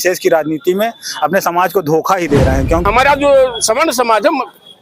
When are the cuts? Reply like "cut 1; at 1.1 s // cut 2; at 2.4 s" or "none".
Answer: cut 1; at 2.8 s